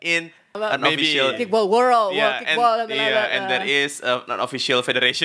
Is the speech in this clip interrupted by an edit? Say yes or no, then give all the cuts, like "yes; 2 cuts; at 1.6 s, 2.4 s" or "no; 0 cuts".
yes; 1 cut; at 1.3 s